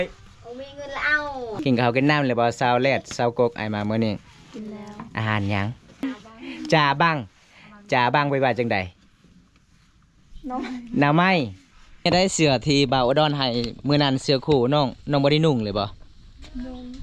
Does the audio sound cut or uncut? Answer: cut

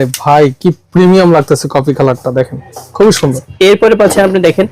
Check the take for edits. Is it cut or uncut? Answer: cut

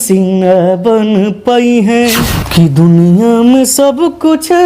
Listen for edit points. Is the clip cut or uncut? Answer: cut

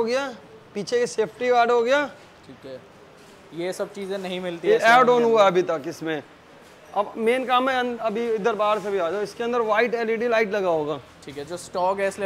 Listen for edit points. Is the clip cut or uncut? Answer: uncut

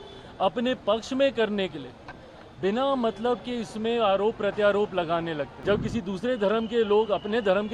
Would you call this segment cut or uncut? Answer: cut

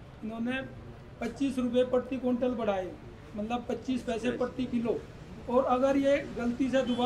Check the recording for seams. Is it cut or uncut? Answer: uncut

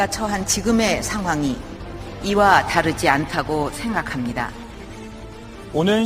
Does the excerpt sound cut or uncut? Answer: cut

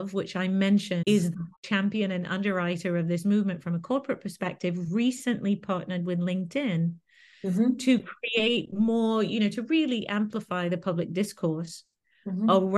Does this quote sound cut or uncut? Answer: cut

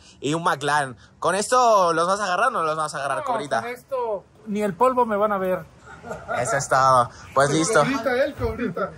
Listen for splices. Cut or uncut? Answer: uncut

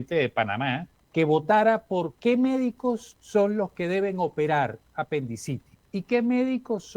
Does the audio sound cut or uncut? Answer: cut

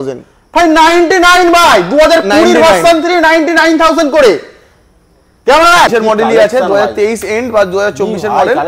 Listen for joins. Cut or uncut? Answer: cut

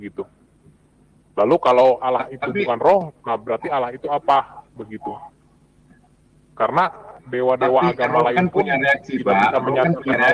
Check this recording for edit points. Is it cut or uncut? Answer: uncut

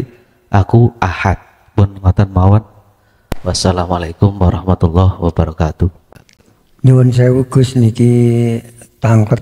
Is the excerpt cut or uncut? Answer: cut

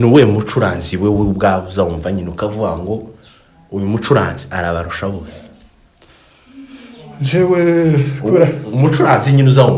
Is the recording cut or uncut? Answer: uncut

